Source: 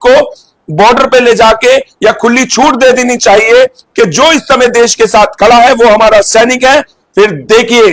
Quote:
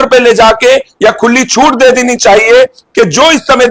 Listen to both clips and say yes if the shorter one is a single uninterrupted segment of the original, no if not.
yes